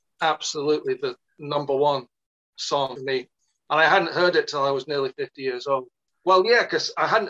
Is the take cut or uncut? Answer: cut